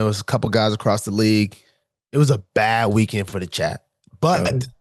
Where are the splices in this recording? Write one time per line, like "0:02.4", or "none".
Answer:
none